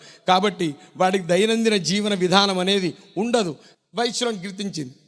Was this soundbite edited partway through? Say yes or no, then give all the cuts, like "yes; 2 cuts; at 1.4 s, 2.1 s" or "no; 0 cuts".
yes; 1 cut; at 3.7 s